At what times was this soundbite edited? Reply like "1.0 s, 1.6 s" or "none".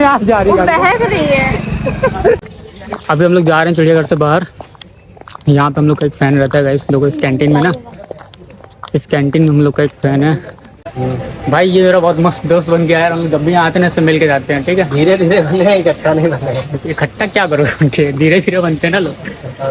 2.4 s, 10.8 s